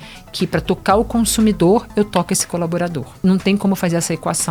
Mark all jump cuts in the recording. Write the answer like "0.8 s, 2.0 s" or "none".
3.2 s